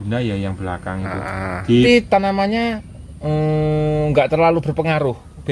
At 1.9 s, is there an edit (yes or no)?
yes